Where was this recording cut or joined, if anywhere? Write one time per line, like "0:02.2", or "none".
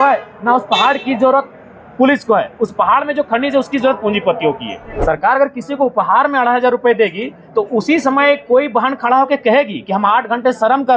0:04.9